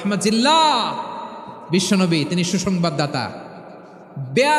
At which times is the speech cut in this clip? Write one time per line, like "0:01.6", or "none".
none